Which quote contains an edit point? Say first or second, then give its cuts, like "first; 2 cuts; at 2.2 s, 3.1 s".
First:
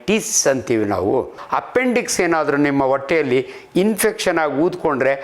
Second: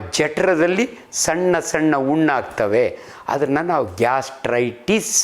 first; 1 cut; at 1.4 s